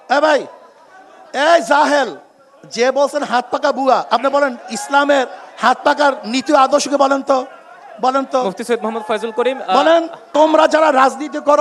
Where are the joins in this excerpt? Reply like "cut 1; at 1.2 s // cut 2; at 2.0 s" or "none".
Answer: cut 1; at 10.3 s